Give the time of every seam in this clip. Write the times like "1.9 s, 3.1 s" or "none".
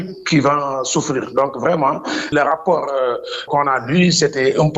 2.3 s, 3.5 s